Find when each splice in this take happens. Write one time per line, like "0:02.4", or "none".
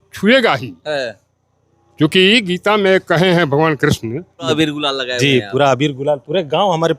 0:04.5

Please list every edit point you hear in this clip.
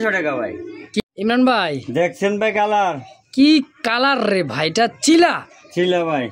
0:01.0

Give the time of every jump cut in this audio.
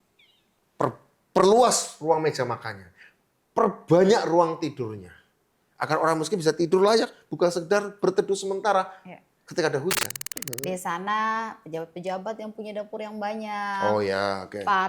0:10.5

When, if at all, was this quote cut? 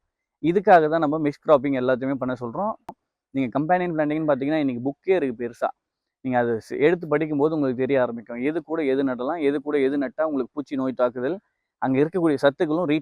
0:03.0

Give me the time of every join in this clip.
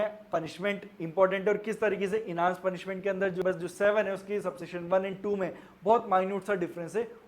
0:03.4

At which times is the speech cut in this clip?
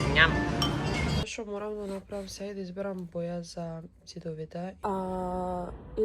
0:01.2
0:04.8

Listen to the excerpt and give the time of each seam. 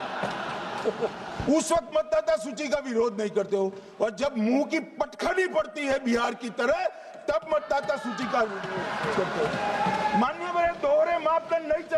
none

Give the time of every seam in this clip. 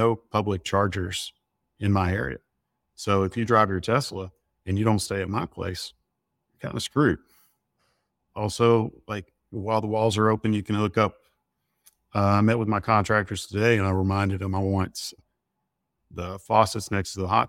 none

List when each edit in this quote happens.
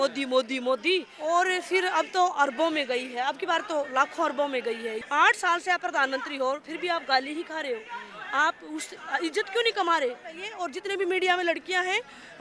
0:01.1
0:05.0
0:10.5

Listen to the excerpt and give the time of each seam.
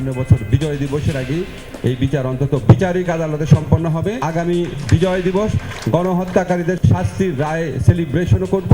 0:04.2
0:06.8

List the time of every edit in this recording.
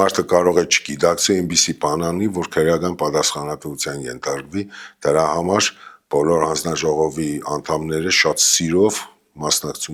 none

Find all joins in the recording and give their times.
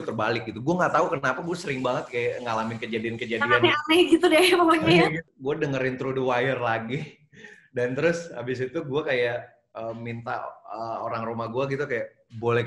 0:05.3

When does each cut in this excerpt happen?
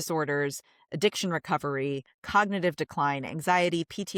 none

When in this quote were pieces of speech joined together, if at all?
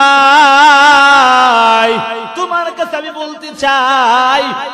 0:02.3

